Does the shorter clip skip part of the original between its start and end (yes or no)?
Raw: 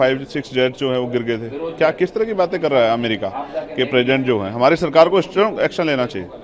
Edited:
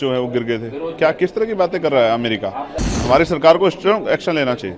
yes